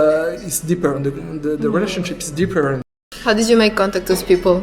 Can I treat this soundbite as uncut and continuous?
no; 1 cut; at 2.9 s

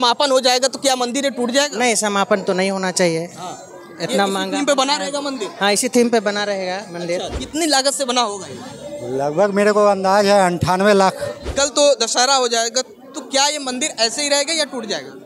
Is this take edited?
yes; 2 cuts; at 7.3 s, 11.4 s

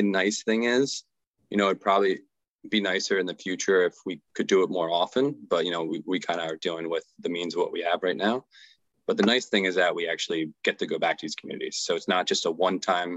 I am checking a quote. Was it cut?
no; 0 cuts

